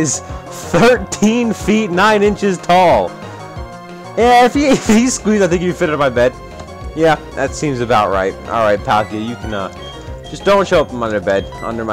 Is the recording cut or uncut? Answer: uncut